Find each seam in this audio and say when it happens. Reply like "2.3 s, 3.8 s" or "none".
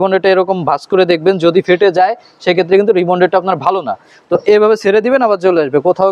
none